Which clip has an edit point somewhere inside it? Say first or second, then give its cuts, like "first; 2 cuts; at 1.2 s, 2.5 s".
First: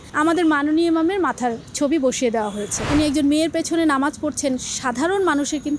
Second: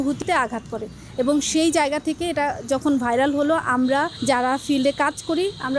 first; 1 cut; at 2.8 s